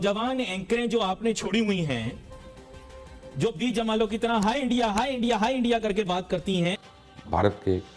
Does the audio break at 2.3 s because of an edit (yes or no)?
no